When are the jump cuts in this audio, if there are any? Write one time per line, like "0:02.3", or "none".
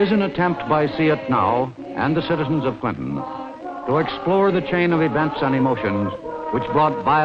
0:01.2